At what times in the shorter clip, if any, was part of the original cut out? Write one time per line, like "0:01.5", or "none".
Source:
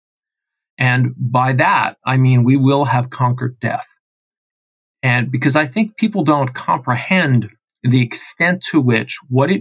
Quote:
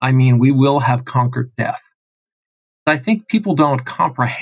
0:02.9